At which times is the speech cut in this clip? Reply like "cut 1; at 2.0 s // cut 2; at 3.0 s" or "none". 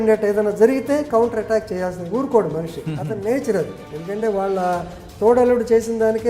cut 1; at 3.8 s